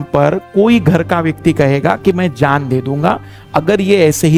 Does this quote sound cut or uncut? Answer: uncut